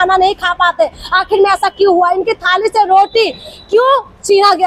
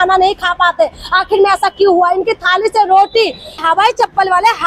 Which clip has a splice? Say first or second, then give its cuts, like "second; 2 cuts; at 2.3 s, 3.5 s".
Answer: second; 1 cut; at 3.6 s